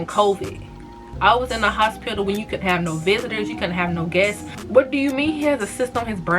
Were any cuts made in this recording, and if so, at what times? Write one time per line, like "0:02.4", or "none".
0:04.5